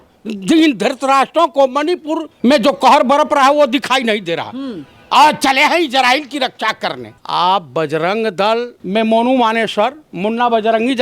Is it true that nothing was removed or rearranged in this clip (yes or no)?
no